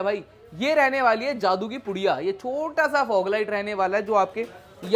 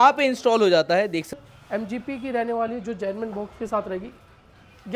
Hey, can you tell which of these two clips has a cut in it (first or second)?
second